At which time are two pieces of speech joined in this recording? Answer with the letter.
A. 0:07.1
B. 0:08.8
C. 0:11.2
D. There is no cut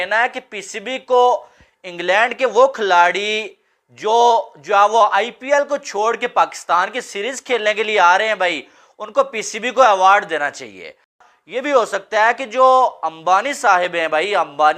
C